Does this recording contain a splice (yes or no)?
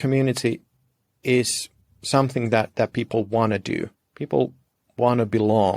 no